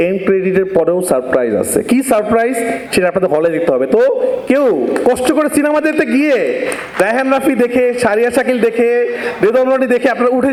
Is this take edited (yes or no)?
no